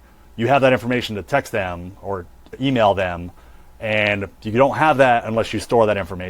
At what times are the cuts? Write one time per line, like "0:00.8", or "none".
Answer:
0:02.6